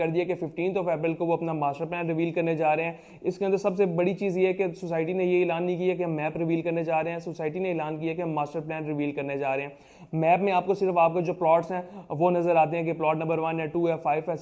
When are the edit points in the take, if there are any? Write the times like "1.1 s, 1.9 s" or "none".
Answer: none